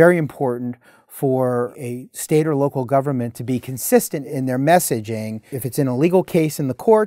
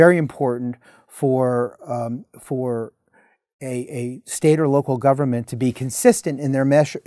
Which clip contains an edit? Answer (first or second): first